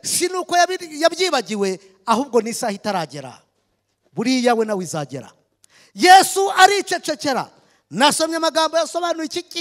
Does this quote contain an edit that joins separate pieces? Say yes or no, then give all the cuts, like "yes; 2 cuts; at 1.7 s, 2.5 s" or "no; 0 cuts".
no; 0 cuts